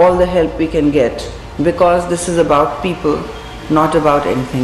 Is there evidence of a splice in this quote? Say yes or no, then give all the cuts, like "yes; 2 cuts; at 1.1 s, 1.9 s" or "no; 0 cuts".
no; 0 cuts